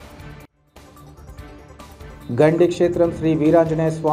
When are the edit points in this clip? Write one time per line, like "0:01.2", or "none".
0:01.5